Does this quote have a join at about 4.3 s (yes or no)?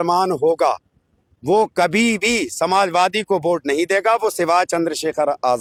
no